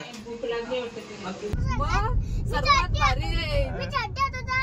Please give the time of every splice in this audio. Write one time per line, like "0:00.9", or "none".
0:01.5